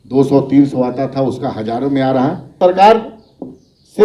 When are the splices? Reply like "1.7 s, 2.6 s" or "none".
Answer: 2.5 s